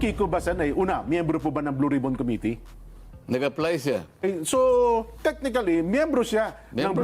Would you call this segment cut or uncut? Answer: cut